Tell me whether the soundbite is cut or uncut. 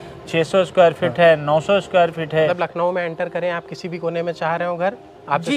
cut